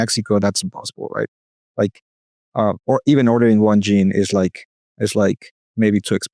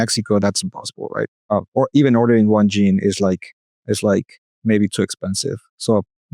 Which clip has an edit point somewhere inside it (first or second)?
second